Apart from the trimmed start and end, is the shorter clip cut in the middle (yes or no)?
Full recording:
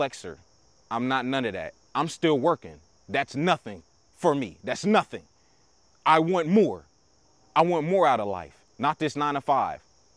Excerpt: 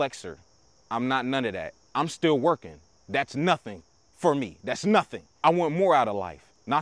yes